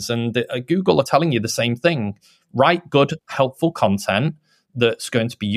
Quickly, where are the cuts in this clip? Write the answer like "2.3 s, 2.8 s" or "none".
1.1 s